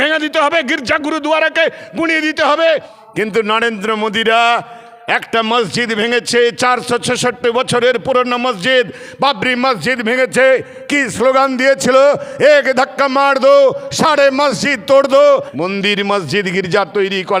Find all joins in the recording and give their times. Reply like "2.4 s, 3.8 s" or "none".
2.7 s, 15.5 s